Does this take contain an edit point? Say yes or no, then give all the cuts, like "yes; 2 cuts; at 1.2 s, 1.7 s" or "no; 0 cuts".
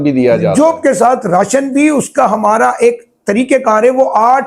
no; 0 cuts